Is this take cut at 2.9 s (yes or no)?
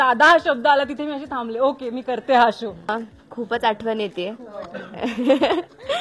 yes